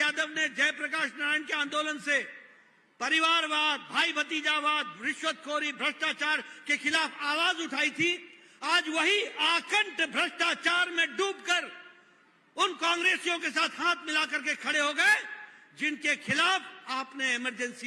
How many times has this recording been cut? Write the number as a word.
zero